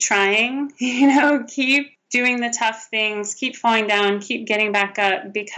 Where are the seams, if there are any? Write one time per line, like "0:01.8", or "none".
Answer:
0:02.0